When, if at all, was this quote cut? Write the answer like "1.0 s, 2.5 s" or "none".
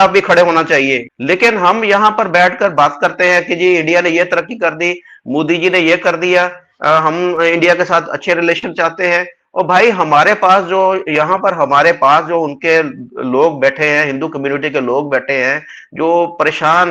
1.1 s

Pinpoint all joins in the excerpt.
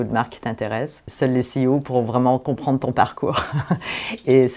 1.0 s

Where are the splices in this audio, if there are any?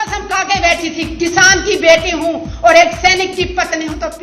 none

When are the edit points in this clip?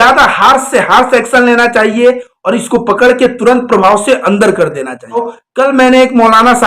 5.4 s

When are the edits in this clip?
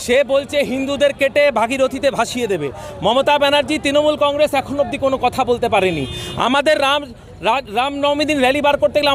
none

